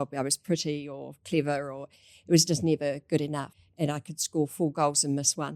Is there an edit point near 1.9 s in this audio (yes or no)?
no